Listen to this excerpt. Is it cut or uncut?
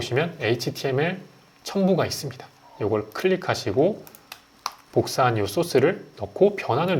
uncut